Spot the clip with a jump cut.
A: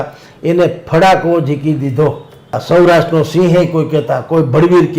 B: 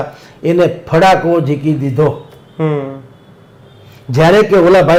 A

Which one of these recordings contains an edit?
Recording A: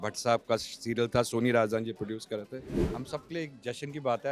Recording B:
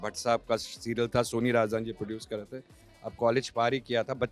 A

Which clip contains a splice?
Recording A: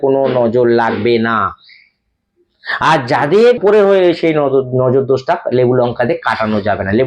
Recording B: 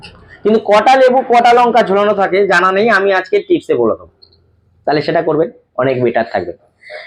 A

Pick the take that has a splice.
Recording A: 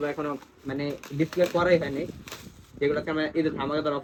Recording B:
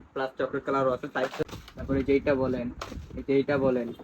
B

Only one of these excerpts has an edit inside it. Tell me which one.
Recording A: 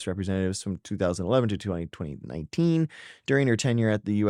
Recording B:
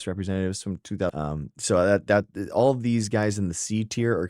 B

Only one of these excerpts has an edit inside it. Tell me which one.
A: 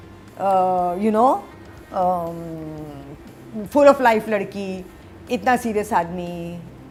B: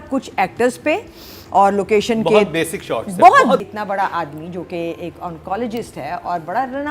B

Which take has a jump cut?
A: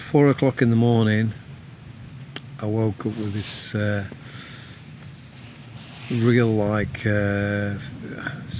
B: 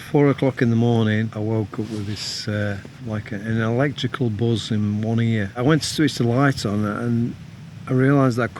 B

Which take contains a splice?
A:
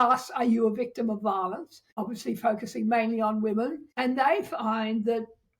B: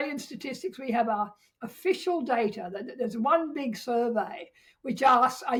A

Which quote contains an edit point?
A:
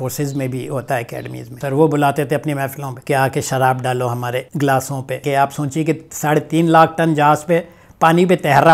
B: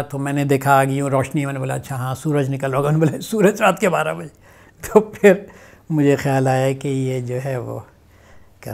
A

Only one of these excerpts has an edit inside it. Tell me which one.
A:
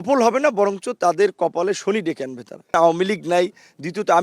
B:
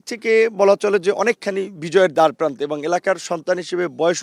A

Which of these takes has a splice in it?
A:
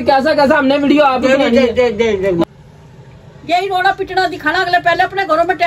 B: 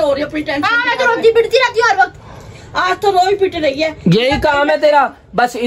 A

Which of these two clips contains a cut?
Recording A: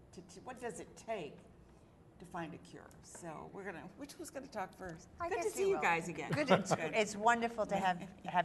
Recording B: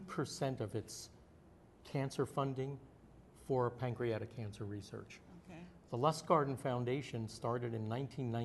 A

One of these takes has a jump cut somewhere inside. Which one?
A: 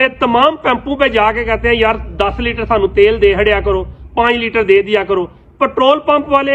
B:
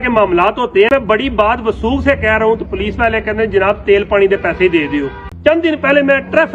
B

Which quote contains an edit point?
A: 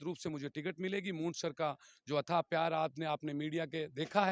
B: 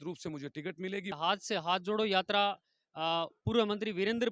B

